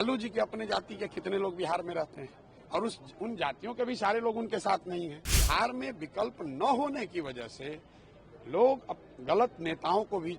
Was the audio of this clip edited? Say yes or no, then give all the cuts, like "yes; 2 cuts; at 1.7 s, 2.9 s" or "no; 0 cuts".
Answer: yes; 1 cut; at 5.3 s